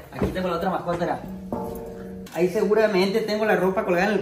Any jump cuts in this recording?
yes; 1 cut; at 2.2 s

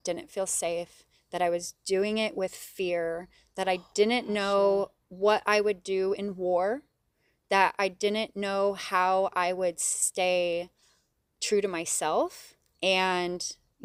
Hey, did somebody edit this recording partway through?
no; 0 cuts

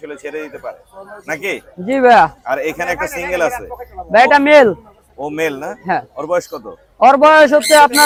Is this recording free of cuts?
yes; 0 cuts

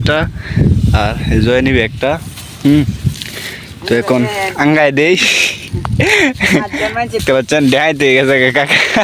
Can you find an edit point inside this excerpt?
yes; 1 cut; at 7.2 s

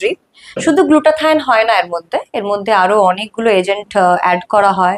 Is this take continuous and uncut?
yes; 0 cuts

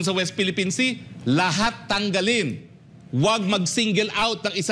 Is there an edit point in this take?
no; 0 cuts

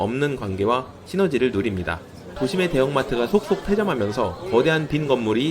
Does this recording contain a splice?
yes; 1 cut; at 2.2 s

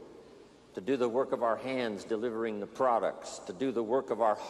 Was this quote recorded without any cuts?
no; 1 cut; at 2.0 s

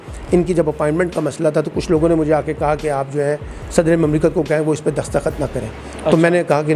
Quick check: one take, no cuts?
yes; 0 cuts

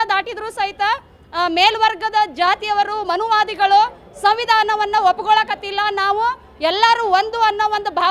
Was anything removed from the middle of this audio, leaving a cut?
no; 0 cuts

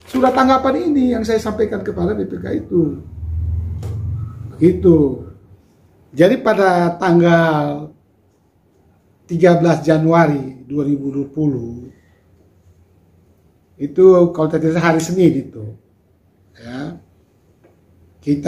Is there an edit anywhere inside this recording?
no; 0 cuts

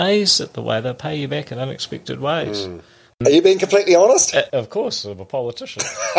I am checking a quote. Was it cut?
yes; 2 cuts; at 3.1 s, 4.5 s

